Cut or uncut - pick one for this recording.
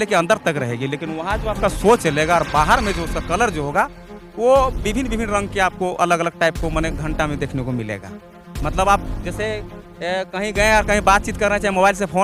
uncut